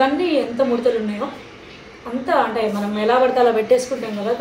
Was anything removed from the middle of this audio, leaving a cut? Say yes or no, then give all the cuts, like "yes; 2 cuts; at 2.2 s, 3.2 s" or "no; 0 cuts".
no; 0 cuts